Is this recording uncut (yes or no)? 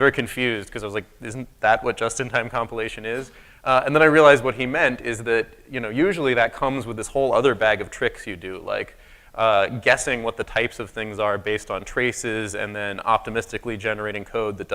yes